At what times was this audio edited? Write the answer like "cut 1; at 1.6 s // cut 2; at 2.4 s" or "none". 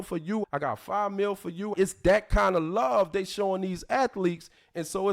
cut 1; at 1.7 s